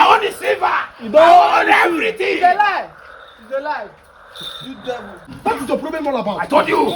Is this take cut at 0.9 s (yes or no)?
no